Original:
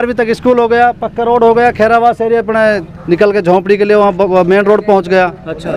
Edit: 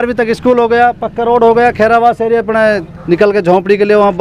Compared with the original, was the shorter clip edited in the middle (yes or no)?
no